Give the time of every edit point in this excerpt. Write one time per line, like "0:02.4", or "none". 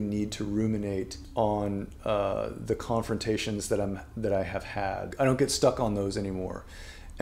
0:01.2
0:05.1